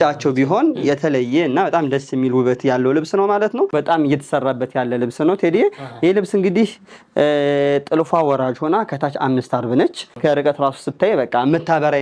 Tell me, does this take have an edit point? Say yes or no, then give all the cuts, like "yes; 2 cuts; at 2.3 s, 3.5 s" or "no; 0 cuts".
yes; 2 cuts; at 3.7 s, 10.0 s